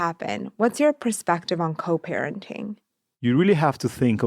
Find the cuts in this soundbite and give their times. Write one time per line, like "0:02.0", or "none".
0:03.0